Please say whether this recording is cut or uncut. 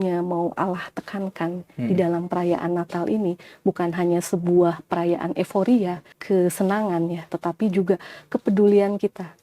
cut